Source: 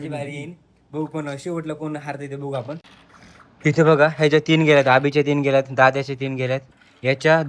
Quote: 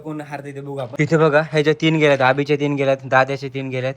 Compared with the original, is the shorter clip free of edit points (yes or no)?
no